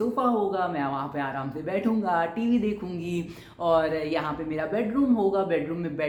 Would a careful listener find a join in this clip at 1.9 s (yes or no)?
no